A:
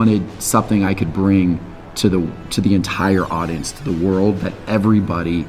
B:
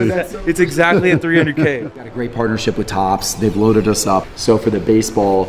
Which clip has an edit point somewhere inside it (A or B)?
B